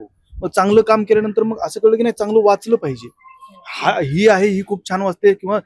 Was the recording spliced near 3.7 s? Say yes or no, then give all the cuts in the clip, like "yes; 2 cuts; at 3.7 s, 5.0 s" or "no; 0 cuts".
no; 0 cuts